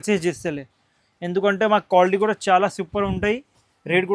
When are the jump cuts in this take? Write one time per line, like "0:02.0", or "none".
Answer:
none